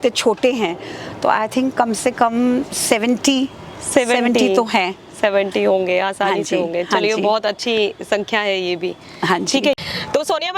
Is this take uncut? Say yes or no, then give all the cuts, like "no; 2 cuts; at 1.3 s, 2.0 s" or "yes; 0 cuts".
yes; 0 cuts